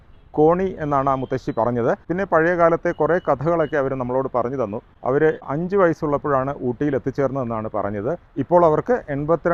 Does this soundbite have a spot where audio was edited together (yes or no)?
no